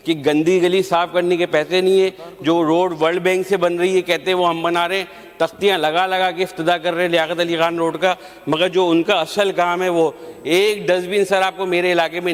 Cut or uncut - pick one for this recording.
uncut